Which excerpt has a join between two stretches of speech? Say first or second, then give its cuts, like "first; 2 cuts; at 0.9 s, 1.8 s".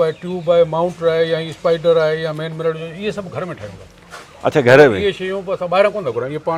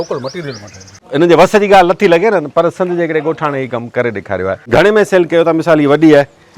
second; 2 cuts; at 0.9 s, 4.6 s